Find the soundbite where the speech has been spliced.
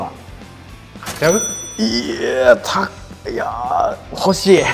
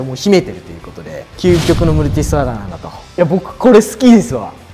second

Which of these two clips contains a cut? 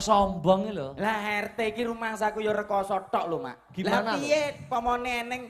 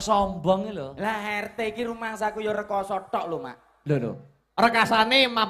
first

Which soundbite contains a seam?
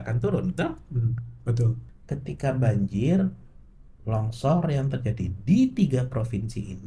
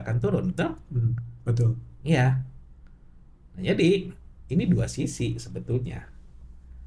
first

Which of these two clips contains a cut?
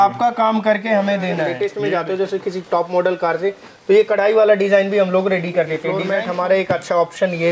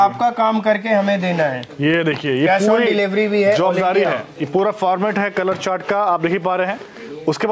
first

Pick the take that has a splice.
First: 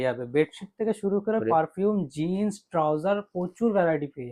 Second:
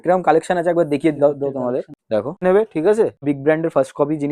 second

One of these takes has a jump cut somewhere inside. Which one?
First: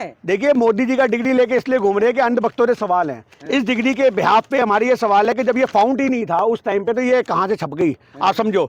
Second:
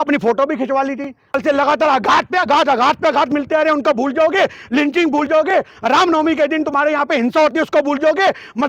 second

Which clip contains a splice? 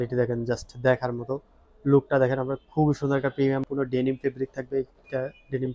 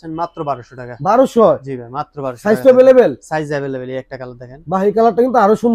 first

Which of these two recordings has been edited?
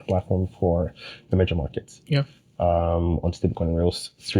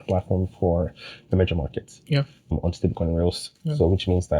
second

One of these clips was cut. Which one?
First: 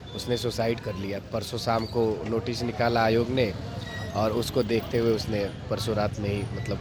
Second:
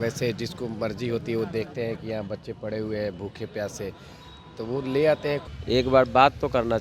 second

